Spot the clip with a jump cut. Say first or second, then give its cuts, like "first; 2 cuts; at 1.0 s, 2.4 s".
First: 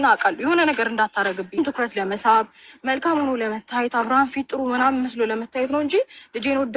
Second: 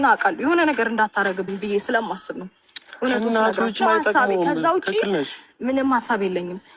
first; 1 cut; at 1.5 s